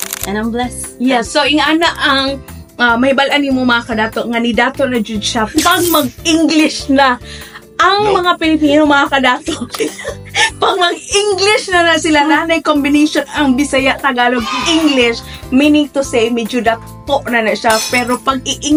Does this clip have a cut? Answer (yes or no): no